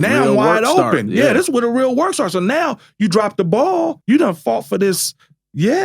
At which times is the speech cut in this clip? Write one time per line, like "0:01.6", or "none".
0:04.0